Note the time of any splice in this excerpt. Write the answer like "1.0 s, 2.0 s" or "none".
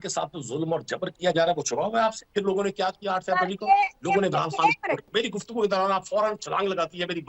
1.1 s, 2.2 s, 5.0 s